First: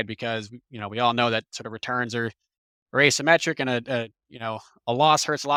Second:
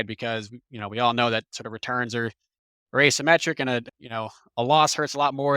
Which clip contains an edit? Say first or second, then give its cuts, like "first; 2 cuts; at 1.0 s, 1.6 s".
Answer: second; 1 cut; at 3.9 s